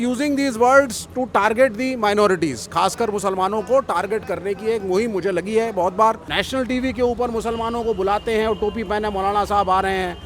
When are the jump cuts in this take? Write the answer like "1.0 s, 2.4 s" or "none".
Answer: 6.3 s

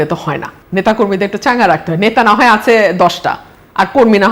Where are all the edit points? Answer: none

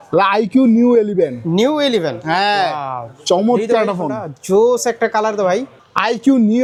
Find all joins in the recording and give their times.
none

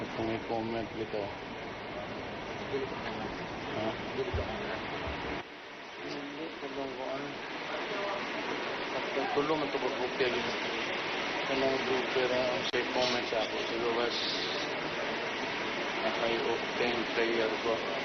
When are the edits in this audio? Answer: none

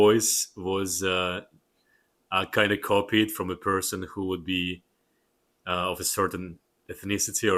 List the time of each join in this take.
none

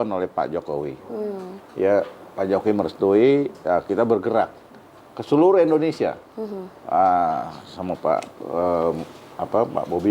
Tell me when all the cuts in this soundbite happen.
none

